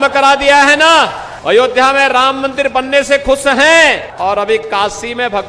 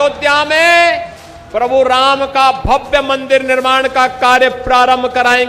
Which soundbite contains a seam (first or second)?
first